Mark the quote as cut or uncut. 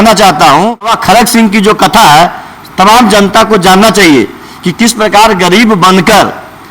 cut